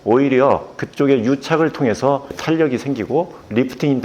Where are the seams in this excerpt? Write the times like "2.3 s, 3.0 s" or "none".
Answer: 2.3 s